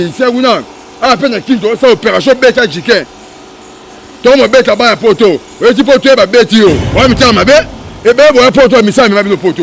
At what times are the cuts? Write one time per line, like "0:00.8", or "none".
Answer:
0:06.9